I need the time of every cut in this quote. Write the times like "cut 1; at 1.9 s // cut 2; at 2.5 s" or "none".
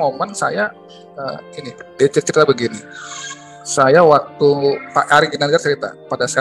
cut 1; at 1.8 s